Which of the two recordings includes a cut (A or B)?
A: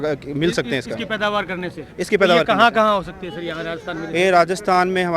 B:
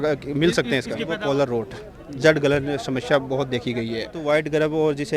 B